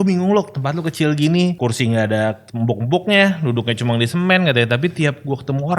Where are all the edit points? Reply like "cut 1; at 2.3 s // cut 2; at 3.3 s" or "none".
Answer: cut 1; at 1.6 s // cut 2; at 2.5 s

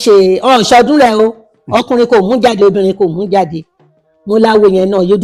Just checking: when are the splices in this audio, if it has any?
none

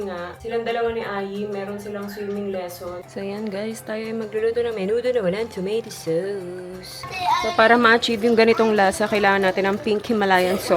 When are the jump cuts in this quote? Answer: cut 1; at 3.0 s // cut 2; at 7.0 s

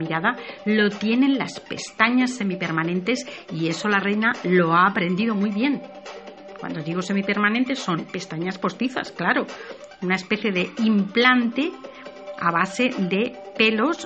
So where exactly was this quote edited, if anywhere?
cut 1; at 5.5 s

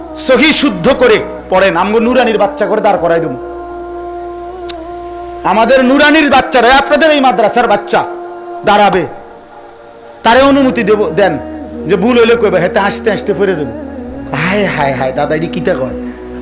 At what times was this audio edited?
cut 1; at 3.3 s // cut 2; at 5.4 s

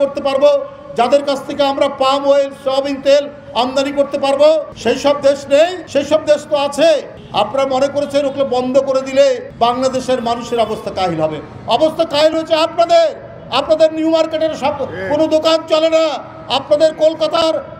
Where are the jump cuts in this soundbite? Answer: cut 1; at 4.7 s // cut 2; at 5.8 s // cut 3; at 9.5 s

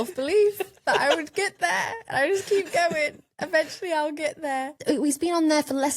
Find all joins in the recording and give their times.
cut 1; at 4.8 s

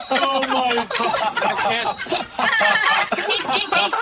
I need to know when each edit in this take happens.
none

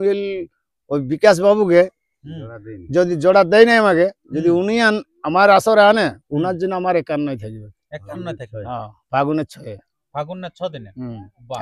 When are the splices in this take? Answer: none

